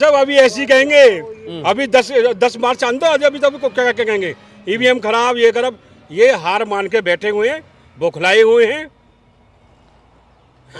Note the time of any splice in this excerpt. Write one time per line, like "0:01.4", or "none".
none